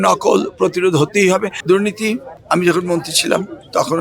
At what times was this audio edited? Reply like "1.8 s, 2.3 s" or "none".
1.5 s